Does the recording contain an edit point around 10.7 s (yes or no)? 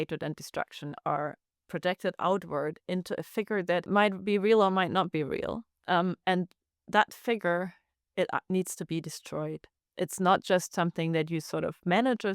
no